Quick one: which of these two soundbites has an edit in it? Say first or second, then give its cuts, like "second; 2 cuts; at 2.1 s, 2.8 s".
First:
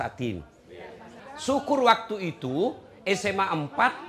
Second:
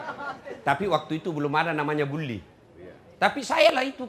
first; 1 cut; at 1.1 s